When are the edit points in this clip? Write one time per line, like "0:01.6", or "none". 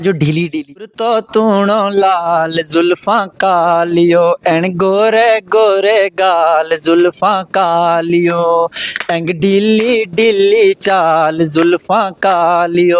0:00.9